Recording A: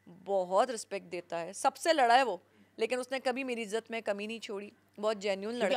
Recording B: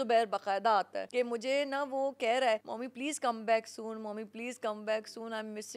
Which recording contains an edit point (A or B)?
B